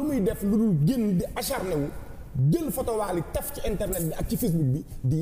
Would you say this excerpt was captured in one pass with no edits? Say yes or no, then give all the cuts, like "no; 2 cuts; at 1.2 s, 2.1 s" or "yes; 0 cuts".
yes; 0 cuts